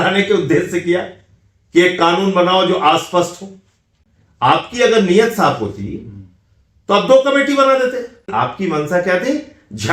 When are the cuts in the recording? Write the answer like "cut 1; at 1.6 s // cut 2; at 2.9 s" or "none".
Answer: cut 1; at 8.3 s